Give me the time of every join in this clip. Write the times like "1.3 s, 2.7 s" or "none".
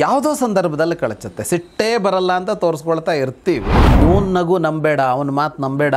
4.0 s